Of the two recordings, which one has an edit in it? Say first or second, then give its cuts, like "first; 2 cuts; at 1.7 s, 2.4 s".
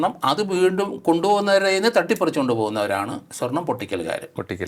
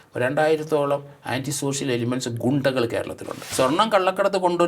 second; 1 cut; at 3.4 s